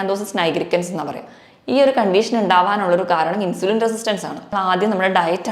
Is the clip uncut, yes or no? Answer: no